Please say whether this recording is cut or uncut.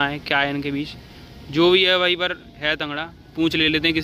uncut